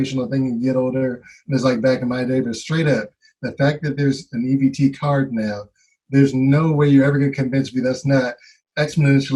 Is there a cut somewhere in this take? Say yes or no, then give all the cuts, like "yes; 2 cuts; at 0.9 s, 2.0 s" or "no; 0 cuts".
no; 0 cuts